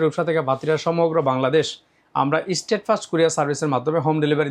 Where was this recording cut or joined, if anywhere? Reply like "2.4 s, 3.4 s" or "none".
none